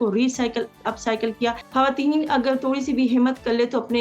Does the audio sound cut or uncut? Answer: cut